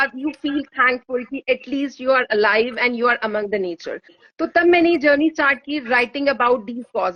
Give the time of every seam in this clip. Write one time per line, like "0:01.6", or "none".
none

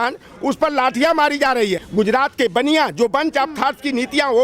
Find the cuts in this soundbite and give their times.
0:01.8

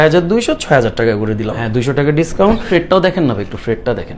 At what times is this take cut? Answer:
0:01.7
0:02.7

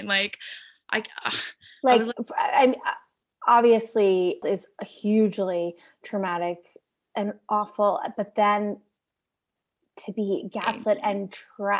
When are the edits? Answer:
0:04.4

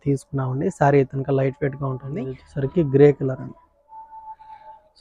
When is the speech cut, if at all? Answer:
0:02.4

